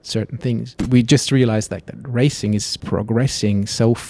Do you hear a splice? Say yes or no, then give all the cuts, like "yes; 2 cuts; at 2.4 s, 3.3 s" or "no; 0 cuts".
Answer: yes; 2 cuts; at 0.8 s, 2.7 s